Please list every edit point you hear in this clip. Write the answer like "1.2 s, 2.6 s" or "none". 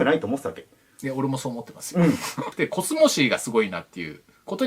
2.4 s